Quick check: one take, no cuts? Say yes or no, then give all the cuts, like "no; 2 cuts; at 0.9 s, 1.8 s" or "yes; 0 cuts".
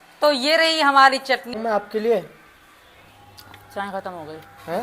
no; 1 cut; at 1.5 s